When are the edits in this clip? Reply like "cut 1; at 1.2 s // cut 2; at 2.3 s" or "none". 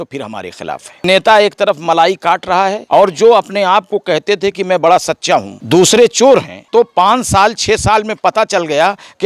cut 1; at 1.0 s // cut 2; at 2.8 s // cut 3; at 5.6 s // cut 4; at 6.6 s